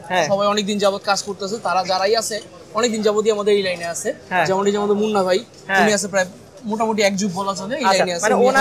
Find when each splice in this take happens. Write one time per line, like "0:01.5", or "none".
none